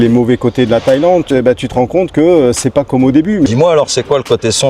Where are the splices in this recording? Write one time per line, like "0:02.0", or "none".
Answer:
0:01.3
0:03.5